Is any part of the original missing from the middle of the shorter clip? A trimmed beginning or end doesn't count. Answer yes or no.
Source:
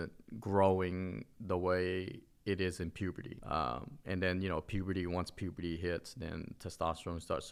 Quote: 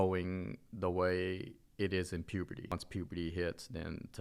yes